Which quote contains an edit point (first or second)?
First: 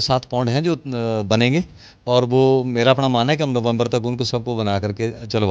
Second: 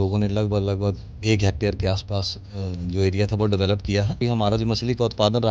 second